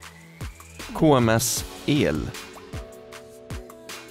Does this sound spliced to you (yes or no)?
yes